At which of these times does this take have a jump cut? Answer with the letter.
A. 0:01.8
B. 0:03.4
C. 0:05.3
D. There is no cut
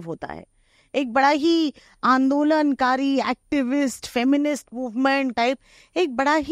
C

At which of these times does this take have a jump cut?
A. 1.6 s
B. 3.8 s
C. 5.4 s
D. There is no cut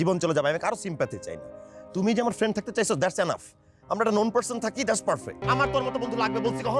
C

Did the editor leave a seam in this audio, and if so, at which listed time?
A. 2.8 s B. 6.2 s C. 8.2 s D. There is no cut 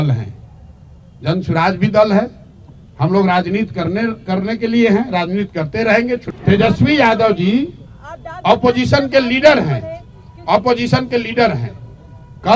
B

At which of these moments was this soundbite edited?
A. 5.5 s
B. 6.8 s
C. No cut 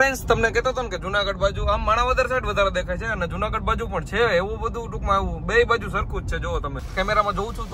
B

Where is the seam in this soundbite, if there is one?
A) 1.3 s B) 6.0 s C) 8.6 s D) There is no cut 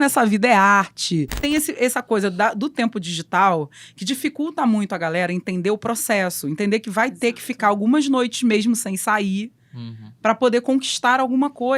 A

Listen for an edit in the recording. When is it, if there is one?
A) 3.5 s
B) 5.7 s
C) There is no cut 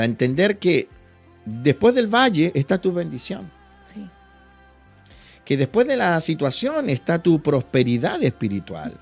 C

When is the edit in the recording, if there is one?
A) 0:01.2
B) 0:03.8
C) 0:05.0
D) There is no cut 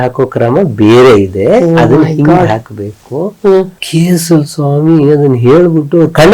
B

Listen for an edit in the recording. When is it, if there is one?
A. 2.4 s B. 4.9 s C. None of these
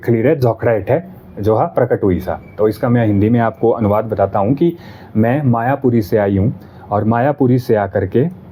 C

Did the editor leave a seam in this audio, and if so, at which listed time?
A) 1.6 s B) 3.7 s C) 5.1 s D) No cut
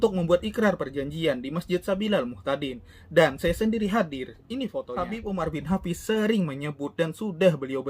C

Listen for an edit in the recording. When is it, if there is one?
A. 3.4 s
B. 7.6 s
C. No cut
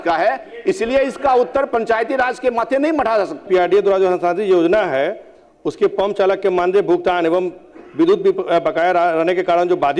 A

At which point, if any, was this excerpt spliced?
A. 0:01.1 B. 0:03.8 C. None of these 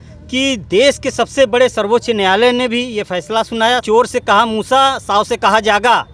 B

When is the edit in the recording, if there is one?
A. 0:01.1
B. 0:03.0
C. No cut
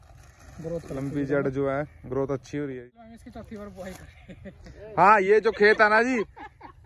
B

